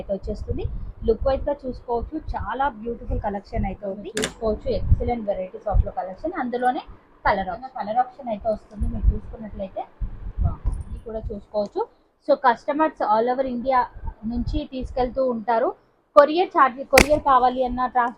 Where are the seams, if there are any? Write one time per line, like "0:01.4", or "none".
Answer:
0:04.1
0:07.7
0:11.0